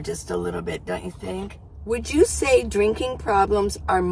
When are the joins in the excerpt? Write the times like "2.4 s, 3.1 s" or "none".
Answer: 1.7 s